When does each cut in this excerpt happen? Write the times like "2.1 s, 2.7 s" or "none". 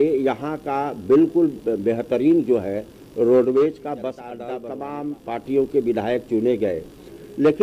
4.5 s

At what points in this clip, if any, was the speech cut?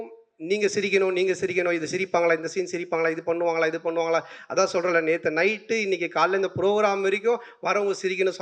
none

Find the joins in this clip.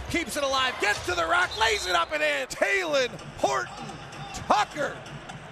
2.5 s

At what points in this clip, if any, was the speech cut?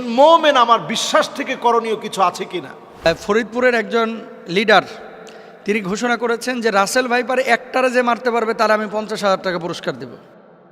3.1 s

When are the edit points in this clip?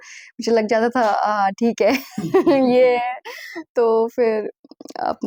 none

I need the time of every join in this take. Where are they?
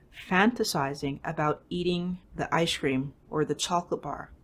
2.2 s

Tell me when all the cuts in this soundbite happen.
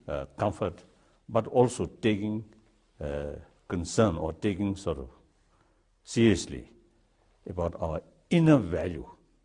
4.4 s

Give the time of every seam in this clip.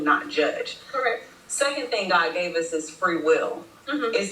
1.5 s

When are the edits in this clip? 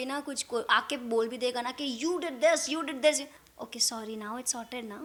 none

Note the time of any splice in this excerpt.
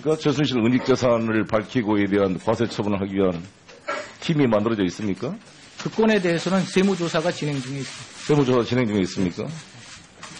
4.4 s

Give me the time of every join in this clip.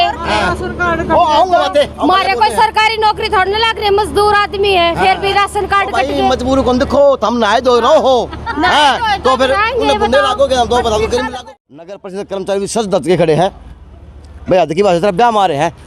11.3 s

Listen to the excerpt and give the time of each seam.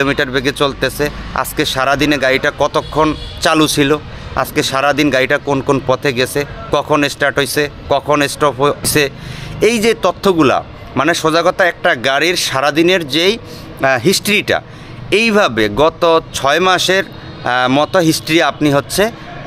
8.9 s

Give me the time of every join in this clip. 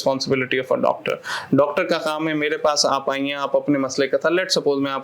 none

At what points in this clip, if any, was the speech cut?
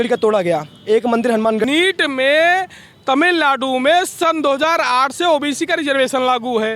1.6 s

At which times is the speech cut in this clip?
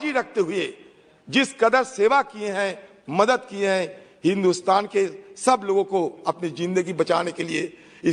none

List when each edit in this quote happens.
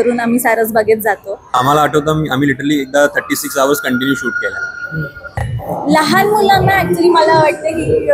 1.5 s, 5.5 s

